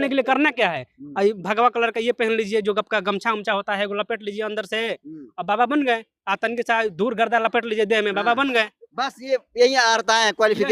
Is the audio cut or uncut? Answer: uncut